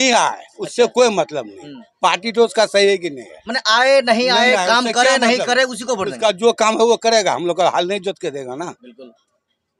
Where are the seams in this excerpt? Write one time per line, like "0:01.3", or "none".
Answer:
none